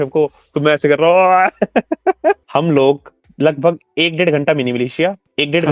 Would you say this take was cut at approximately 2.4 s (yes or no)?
yes